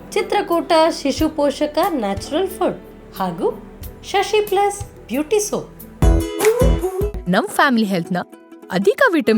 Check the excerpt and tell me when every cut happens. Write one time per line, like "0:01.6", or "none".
0:05.8

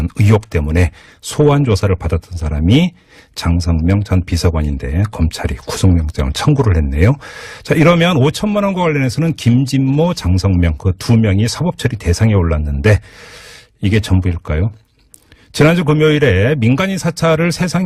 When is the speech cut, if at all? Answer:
none

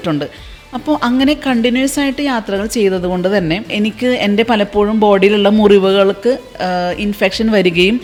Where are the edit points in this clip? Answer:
none

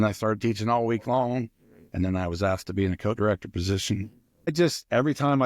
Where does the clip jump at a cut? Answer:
0:04.5

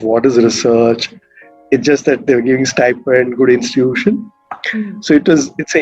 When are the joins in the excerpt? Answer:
none

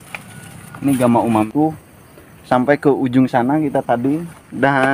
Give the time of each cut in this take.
0:01.5

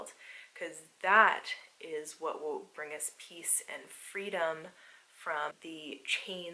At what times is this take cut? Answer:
0:05.6

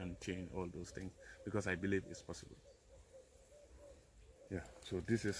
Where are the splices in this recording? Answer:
none

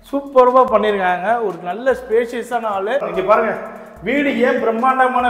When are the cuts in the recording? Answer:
0:03.1

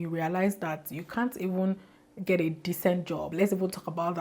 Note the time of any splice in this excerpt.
0:03.3

